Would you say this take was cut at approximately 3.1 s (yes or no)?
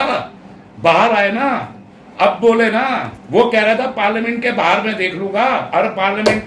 yes